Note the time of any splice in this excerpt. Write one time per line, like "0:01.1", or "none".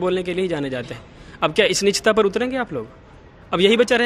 none